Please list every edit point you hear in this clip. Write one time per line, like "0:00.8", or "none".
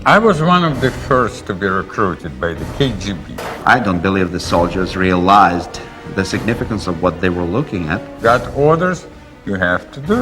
0:03.3
0:08.1